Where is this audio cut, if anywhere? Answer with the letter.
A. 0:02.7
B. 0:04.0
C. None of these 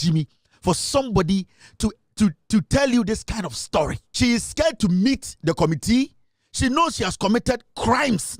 B